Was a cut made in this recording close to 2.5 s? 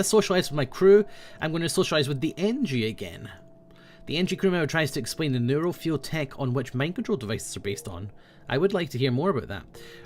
yes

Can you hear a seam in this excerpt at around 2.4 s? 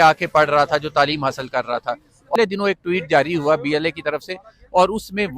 yes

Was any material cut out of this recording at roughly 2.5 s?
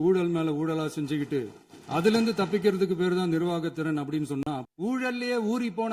no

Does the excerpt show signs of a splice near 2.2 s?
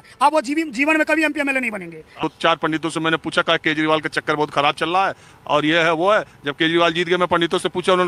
yes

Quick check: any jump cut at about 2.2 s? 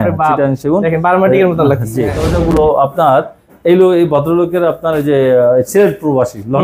yes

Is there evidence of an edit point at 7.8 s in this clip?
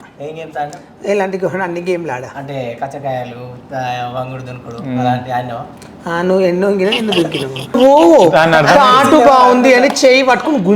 yes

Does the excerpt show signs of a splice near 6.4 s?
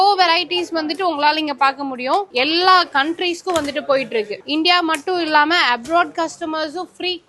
no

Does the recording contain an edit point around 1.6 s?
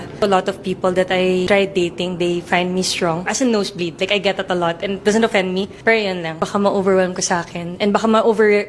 no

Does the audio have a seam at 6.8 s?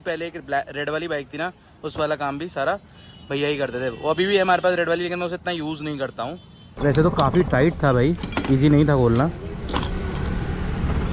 yes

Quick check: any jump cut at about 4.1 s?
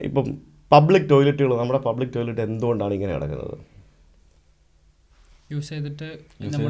no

